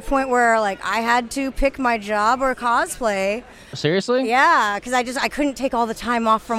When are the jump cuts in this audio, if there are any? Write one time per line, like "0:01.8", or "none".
none